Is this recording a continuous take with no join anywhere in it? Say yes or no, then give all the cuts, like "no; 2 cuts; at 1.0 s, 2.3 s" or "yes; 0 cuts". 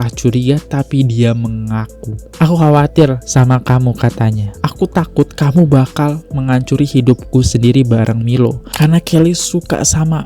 no; 1 cut; at 8.6 s